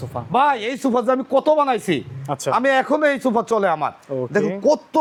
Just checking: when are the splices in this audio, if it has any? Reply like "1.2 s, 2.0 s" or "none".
none